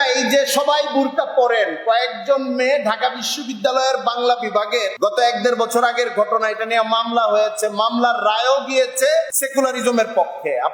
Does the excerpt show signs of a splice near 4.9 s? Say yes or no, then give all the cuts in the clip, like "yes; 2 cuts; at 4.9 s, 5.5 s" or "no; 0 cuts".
yes; 2 cuts; at 4.9 s, 9.4 s